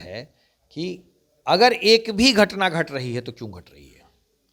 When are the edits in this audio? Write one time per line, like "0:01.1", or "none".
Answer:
none